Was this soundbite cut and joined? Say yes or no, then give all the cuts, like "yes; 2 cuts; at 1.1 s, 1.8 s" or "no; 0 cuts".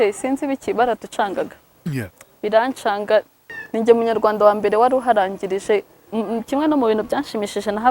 yes; 2 cuts; at 3.4 s, 6.0 s